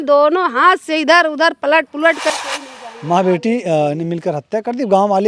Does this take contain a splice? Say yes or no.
yes